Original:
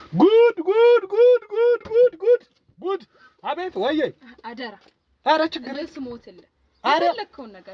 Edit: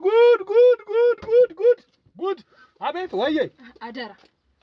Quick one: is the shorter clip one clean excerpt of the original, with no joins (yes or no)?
yes